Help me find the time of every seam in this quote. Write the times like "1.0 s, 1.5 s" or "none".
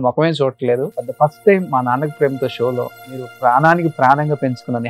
1.0 s, 3.3 s